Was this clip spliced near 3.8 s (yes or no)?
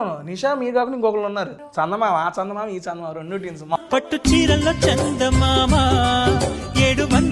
yes